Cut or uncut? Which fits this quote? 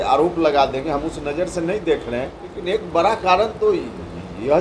cut